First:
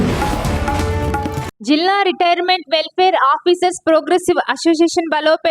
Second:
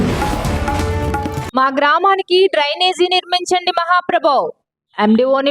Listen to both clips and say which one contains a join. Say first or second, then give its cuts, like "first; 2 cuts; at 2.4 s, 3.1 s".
first; 1 cut; at 1.4 s